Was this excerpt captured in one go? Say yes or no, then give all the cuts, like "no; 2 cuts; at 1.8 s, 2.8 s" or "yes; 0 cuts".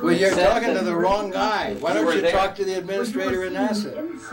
yes; 0 cuts